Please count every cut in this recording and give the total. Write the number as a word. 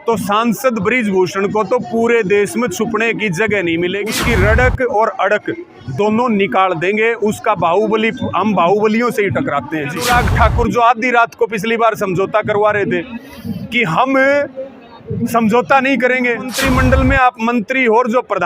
three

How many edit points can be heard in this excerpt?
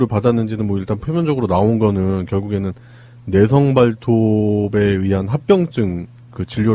one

